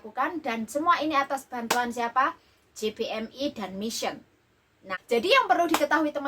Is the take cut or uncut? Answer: cut